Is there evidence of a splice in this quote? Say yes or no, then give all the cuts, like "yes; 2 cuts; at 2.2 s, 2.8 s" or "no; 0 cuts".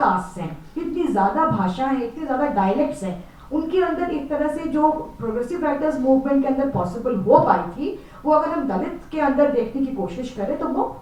no; 0 cuts